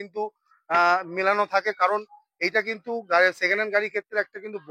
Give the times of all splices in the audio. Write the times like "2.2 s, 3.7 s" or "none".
none